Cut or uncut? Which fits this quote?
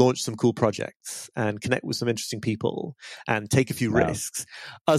uncut